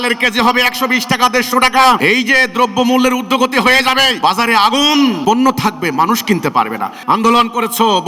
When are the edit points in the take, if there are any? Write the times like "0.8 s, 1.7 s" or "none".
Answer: 2.0 s, 4.1 s, 5.2 s, 6.9 s

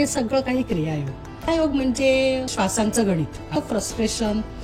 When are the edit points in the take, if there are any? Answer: 1.5 s, 2.5 s, 3.5 s

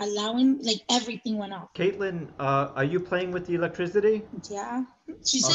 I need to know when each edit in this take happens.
1.6 s

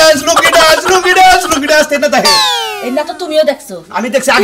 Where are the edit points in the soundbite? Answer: none

